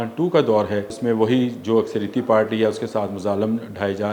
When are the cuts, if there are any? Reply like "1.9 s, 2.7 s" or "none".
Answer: 0.9 s